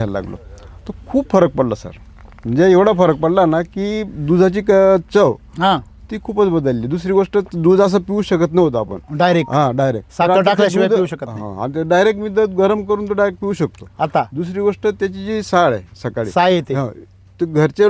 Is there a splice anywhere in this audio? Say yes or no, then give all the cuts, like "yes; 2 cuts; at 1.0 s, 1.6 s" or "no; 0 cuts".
no; 0 cuts